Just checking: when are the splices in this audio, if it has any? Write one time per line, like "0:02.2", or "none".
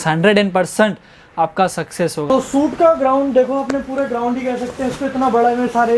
0:02.3